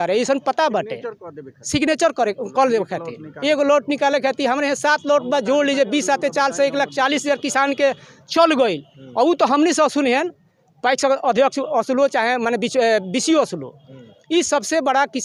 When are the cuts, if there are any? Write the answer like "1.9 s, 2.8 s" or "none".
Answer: none